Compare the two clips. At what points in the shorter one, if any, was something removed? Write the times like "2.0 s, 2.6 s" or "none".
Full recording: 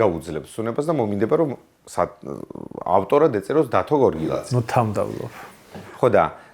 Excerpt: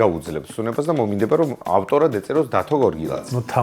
1.6 s